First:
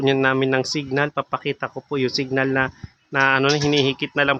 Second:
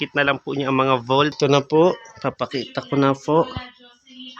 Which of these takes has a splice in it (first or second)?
second